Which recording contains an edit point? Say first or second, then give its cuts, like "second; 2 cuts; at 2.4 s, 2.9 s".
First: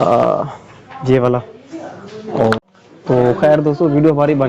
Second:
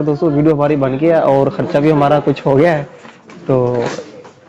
first; 1 cut; at 2.6 s